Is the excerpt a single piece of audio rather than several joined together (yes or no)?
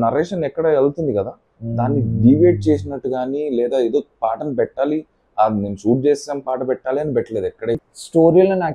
no